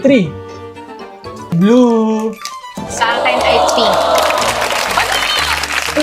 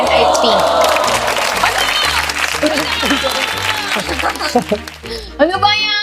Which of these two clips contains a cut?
first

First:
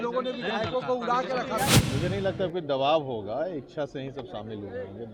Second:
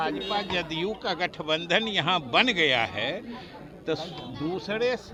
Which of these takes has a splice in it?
first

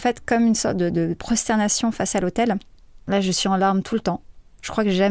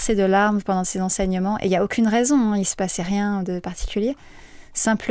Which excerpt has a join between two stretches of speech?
first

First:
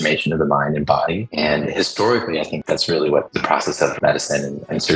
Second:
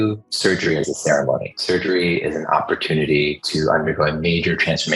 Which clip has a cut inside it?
second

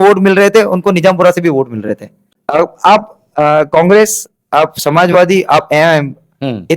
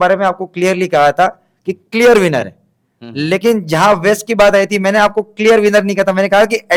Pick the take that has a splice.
first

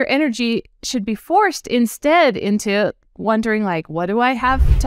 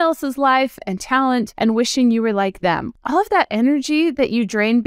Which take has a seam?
second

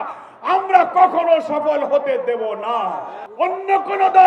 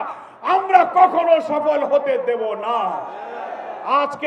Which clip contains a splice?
first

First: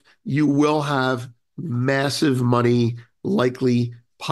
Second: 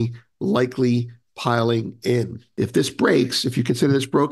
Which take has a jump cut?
second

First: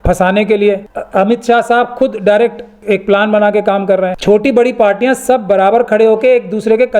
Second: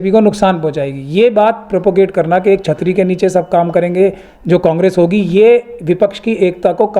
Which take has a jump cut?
first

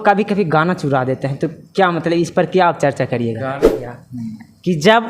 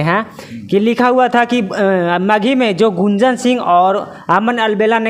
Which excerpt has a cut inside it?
first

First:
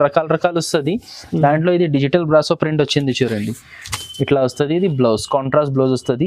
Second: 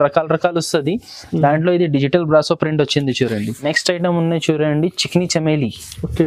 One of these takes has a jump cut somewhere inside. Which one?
second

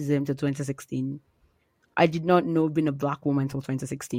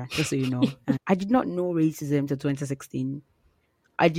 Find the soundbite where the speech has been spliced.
second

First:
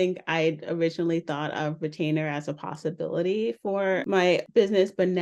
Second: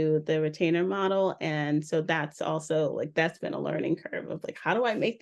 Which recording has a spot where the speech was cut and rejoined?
first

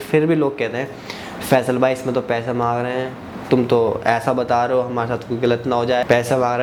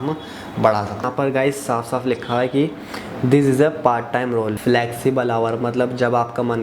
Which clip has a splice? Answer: second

